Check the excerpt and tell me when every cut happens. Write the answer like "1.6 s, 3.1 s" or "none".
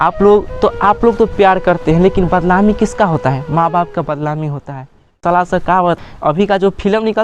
5.1 s, 6.0 s